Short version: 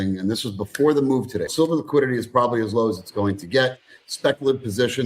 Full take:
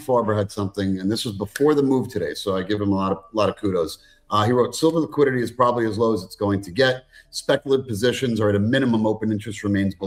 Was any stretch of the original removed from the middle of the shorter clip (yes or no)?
yes